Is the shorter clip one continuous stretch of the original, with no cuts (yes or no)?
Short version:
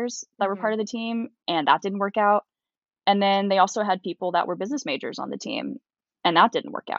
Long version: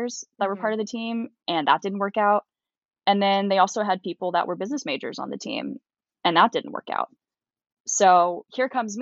yes